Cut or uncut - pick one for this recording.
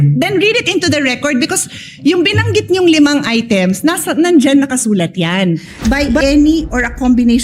cut